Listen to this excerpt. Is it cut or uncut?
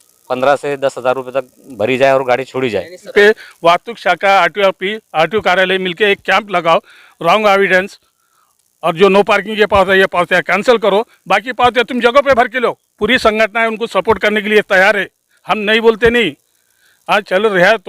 cut